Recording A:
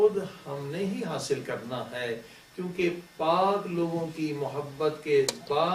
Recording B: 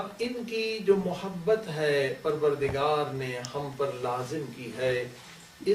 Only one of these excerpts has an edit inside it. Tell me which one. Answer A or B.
A